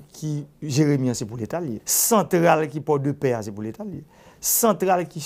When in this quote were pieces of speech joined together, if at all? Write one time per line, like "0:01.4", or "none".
0:01.9